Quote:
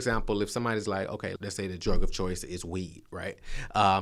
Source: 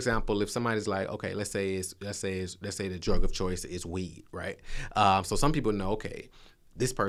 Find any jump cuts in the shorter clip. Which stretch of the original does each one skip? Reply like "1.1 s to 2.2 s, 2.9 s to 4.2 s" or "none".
1.3 s to 2.5 s